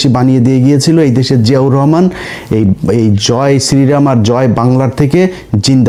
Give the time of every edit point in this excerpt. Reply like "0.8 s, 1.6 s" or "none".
none